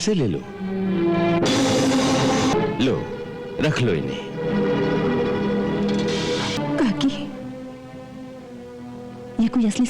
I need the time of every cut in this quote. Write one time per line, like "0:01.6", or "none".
0:02.5
0:06.6